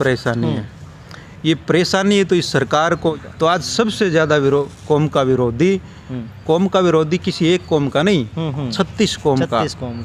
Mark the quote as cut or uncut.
cut